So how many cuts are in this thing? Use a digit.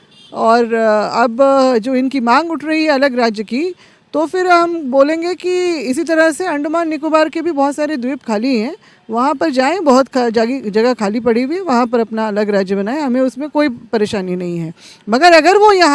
0